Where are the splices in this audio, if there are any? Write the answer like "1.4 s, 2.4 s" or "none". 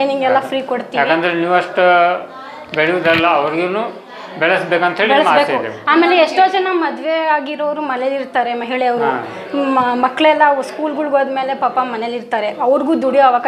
none